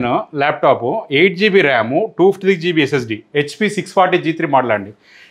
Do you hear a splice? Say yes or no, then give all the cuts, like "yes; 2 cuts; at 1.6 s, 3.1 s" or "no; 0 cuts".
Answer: no; 0 cuts